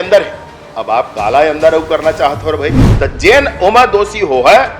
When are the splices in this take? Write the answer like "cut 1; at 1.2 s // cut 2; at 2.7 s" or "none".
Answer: cut 1; at 2.8 s